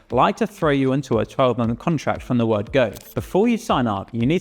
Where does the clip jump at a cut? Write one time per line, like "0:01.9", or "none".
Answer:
0:03.1